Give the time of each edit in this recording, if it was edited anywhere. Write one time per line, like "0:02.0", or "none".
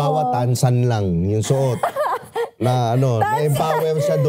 none